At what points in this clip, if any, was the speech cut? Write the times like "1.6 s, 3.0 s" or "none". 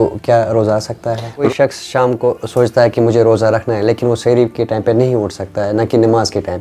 1.5 s

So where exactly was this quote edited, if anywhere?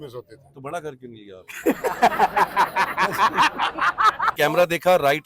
4.3 s

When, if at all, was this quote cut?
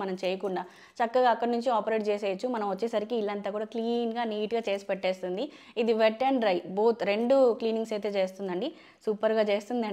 none

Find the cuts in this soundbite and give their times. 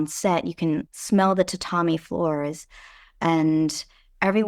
0.9 s

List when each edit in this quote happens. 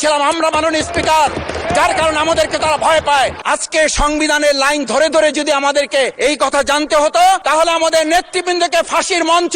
3.4 s, 6.1 s, 7.4 s

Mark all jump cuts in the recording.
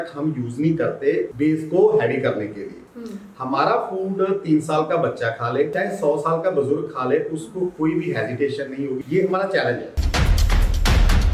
1.3 s, 5.7 s, 9.0 s, 10.0 s

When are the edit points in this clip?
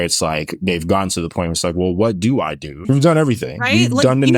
2.7 s

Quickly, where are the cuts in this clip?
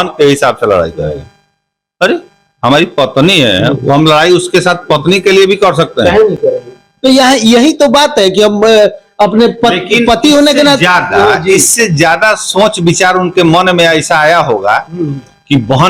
none

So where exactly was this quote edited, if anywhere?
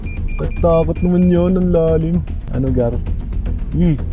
2.4 s

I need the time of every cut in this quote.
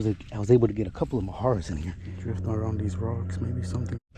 2.1 s

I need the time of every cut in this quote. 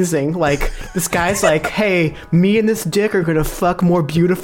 none

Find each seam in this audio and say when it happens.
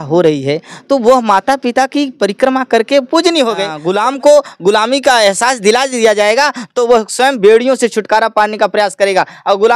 3.8 s

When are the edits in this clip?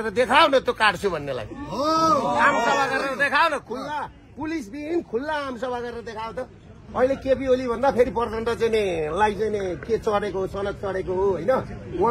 6.8 s

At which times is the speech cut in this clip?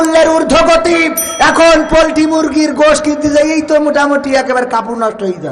none

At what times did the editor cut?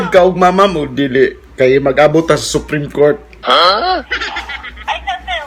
none

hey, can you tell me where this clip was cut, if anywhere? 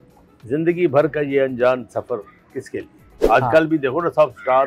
3.1 s

